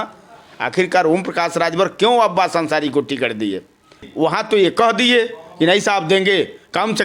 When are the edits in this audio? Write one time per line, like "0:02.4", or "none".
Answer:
0:04.1